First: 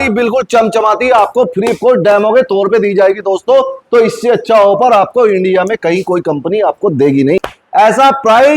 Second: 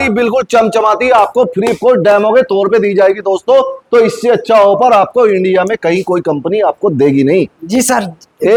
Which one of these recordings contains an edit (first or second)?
first